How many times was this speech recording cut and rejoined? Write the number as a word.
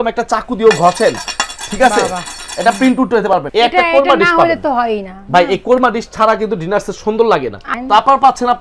two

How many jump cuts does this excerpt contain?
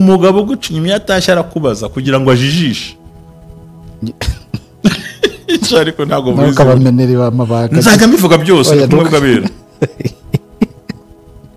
zero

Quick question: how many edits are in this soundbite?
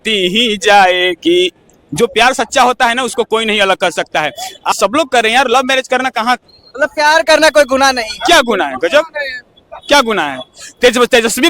one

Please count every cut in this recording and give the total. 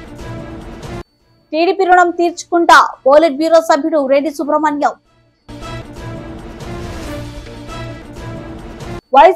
zero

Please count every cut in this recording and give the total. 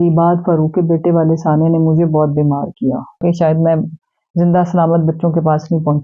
one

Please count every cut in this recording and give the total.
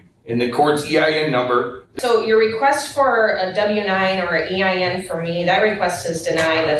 one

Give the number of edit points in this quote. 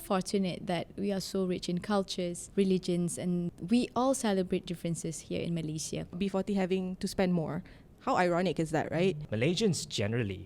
four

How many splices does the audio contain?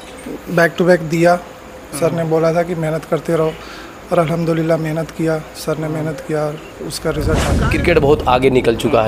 one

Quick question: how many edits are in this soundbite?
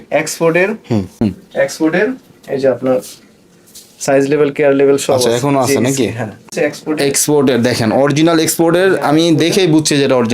two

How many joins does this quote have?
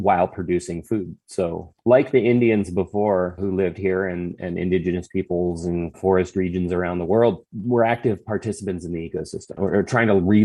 one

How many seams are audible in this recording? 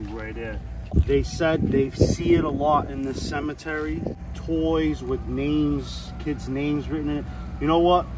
two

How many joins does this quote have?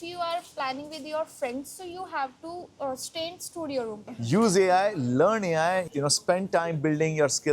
two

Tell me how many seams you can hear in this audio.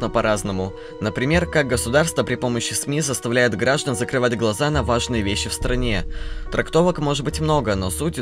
one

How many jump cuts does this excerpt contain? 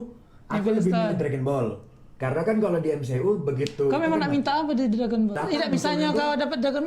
one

